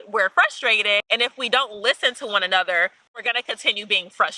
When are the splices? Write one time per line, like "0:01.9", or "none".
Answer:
none